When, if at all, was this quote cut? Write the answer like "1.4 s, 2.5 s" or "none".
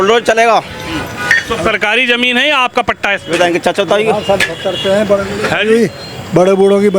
none